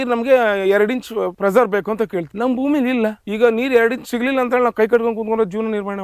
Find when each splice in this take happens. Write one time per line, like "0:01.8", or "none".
0:01.3
0:02.3
0:03.2